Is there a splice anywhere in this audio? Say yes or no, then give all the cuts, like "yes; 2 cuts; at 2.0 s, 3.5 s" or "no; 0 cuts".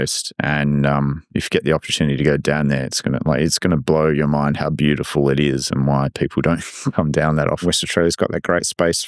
yes; 1 cut; at 7.6 s